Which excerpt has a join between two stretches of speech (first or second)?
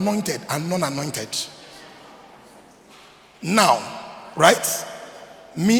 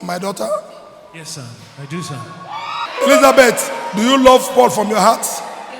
second